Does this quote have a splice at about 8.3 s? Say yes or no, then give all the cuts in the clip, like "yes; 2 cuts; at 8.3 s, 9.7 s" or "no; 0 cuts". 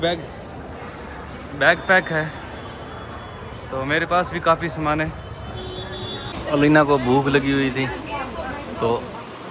no; 1 cut; at 6.3 s